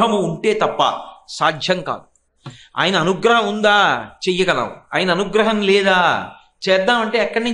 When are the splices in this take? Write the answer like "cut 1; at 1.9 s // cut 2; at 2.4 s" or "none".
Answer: none